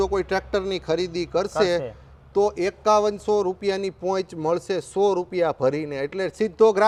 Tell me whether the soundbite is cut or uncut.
uncut